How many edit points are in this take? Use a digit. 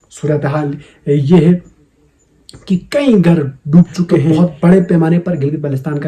1